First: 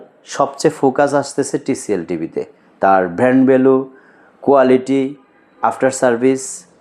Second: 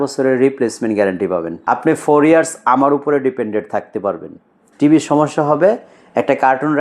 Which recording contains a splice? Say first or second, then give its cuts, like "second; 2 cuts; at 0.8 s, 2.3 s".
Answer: second; 1 cut; at 1.5 s